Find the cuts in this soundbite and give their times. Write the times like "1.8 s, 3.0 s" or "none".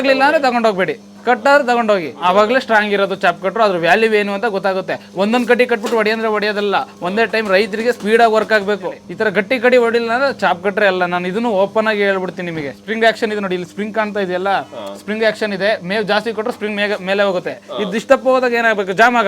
2.1 s, 9.0 s, 12.8 s, 17.6 s